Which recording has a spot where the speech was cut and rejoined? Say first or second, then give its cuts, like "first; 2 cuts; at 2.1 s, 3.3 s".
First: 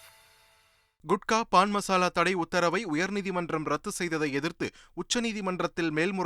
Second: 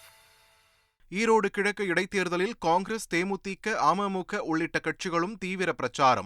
first; 1 cut; at 0.9 s